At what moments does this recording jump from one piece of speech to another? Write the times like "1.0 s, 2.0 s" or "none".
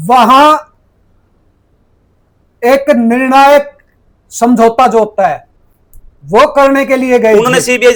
none

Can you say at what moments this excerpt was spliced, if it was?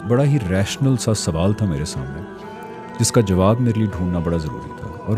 none

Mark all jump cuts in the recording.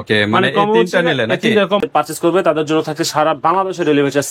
1.8 s

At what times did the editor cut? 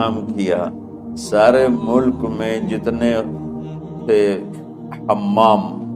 none

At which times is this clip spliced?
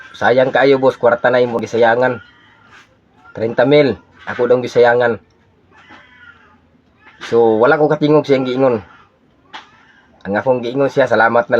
1.6 s

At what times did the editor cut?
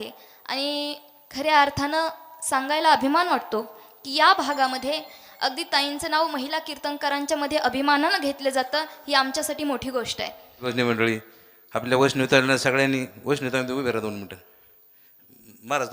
10.7 s

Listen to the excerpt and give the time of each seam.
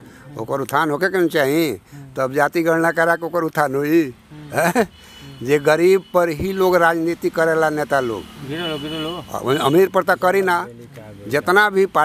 none

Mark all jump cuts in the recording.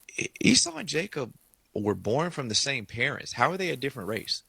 3.5 s

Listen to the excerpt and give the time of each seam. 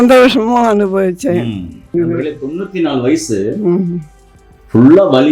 1.9 s

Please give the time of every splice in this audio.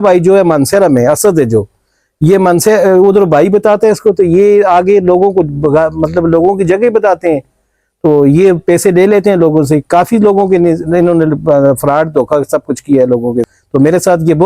13.6 s

